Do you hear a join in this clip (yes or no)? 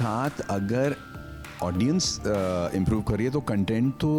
no